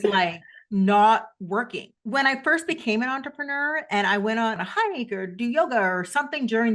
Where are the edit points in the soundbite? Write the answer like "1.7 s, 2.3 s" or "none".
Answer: 1.9 s, 4.6 s